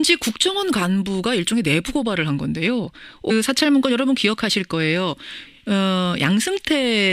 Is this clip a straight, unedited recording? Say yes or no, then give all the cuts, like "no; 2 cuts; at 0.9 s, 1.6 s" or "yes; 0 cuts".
yes; 0 cuts